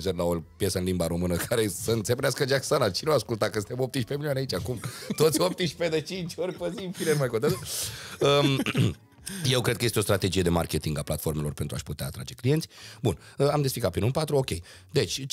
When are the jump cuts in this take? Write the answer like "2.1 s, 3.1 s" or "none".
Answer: none

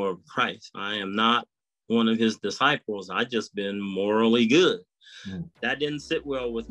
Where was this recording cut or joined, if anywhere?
5.6 s

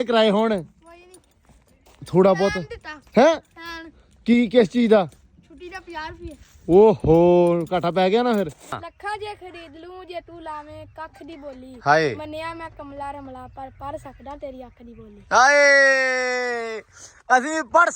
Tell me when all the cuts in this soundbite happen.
8.9 s

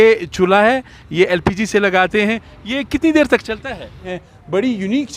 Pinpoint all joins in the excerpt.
4.1 s

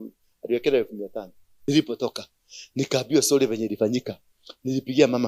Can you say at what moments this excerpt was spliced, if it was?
1.7 s

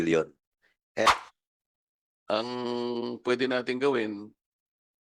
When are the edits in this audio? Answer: 1.1 s

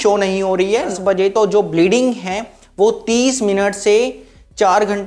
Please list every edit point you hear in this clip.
0.9 s

